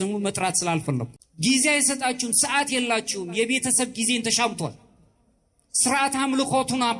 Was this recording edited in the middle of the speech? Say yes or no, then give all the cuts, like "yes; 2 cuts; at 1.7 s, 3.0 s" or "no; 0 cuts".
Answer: yes; 1 cut; at 1.2 s